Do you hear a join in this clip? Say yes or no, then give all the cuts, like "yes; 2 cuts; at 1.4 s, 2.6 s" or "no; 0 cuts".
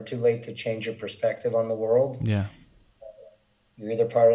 no; 0 cuts